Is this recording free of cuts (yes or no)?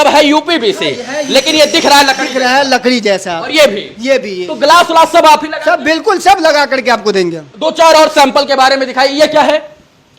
yes